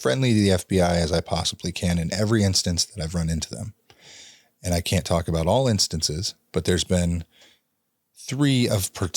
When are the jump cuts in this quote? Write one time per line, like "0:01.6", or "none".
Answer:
none